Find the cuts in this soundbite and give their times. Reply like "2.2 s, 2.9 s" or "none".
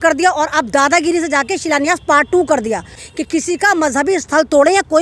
3.0 s